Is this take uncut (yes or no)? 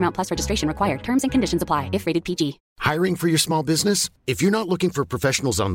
no